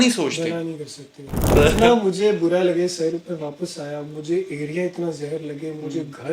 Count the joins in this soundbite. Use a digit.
1